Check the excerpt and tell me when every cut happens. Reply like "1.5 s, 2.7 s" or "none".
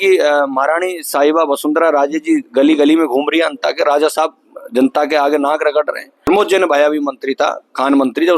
6.3 s